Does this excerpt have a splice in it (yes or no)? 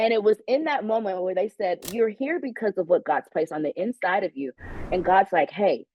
yes